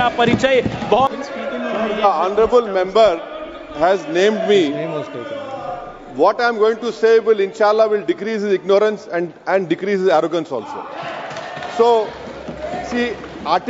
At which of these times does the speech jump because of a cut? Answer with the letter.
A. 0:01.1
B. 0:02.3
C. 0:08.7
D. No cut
D